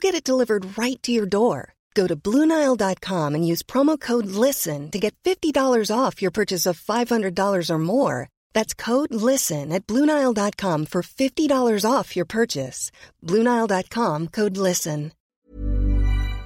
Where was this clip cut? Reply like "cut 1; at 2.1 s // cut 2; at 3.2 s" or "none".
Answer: cut 1; at 15.2 s